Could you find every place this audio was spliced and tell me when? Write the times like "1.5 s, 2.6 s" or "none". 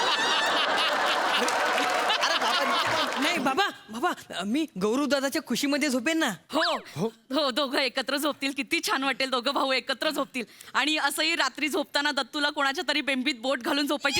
3.1 s